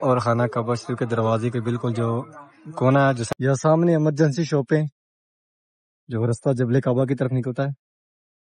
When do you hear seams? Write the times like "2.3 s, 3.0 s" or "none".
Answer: 3.2 s